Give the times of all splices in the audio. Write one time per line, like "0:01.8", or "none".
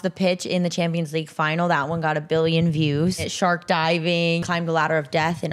0:03.3
0:04.4